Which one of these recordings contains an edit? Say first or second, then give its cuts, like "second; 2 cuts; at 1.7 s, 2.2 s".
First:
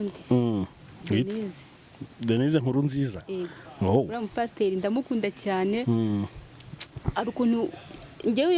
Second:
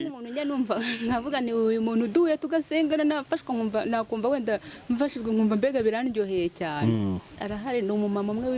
second; 1 cut; at 7.3 s